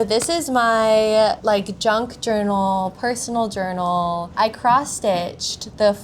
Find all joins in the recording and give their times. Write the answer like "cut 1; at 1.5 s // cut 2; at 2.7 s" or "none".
cut 1; at 1.4 s // cut 2; at 4.3 s